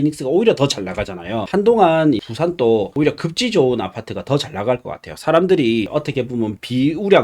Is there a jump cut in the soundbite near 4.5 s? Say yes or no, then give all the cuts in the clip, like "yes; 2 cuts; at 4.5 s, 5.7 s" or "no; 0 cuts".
no; 4 cuts; at 1.4 s, 2.2 s, 2.9 s, 6.0 s